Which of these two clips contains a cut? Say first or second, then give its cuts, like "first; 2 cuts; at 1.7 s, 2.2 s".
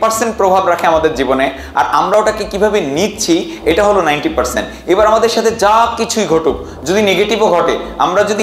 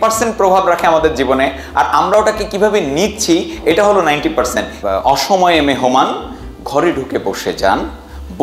second; 1 cut; at 4.7 s